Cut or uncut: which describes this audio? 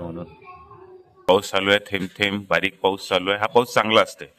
cut